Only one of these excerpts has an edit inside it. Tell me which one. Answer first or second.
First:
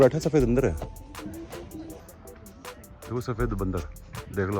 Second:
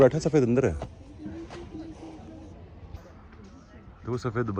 first